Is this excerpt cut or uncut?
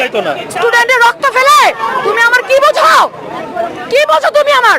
uncut